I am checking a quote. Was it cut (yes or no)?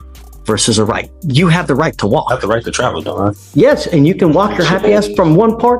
yes